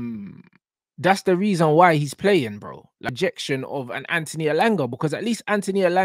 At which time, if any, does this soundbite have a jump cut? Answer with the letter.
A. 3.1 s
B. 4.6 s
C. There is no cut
A